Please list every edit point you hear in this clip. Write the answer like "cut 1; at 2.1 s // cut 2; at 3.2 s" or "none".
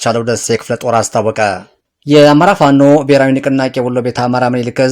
cut 1; at 1.7 s